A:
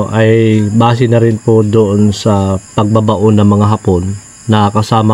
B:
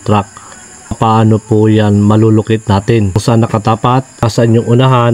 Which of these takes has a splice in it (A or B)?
B